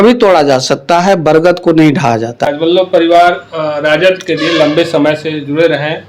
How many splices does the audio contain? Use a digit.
1